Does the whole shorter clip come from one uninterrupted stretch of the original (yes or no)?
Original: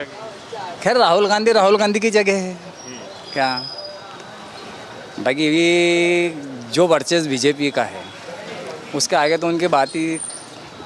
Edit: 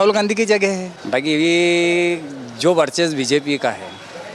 no